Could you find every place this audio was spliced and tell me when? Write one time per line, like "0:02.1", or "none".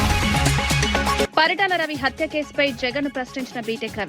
0:01.2